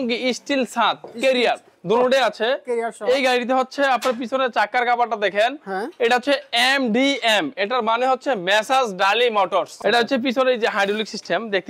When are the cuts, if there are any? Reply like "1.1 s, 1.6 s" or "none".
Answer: 9.7 s

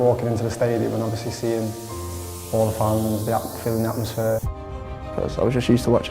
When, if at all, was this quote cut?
4.7 s

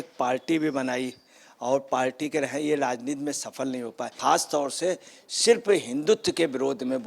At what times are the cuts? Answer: 4.1 s

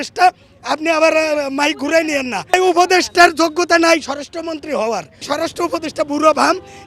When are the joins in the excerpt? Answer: 2.5 s, 5.3 s

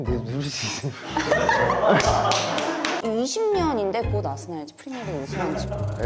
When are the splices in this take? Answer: 3.0 s

